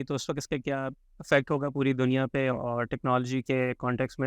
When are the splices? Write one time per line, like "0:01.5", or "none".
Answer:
0:01.1